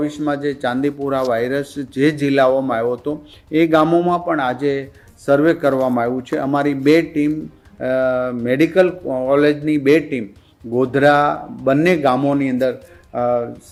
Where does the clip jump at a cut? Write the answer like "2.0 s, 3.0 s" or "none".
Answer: none